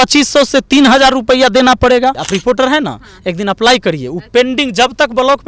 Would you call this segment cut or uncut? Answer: cut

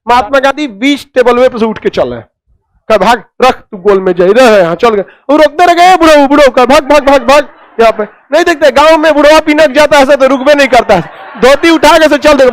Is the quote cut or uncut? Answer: uncut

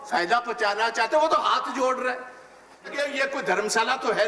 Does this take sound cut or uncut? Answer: cut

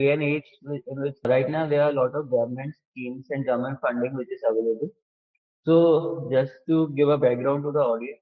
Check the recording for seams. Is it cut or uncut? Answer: uncut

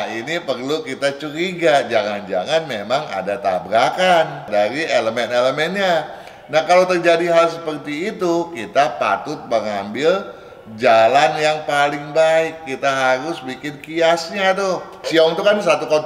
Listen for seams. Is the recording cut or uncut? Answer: cut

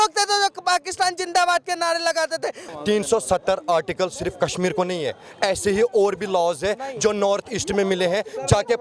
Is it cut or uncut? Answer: cut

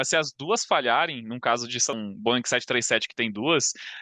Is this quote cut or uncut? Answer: cut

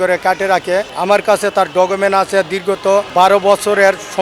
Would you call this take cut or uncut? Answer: cut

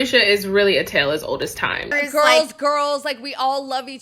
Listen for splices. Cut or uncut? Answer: cut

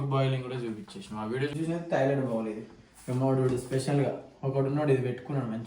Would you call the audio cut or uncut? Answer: cut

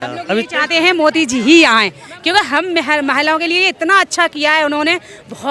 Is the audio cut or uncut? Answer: uncut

